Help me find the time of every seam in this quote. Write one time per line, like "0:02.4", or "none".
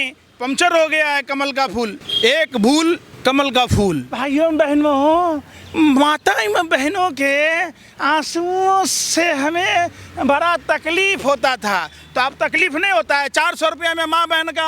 0:02.0
0:03.1
0:04.1